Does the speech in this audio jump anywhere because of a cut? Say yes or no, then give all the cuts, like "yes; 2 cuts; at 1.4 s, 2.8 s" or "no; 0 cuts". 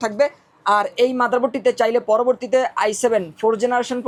no; 0 cuts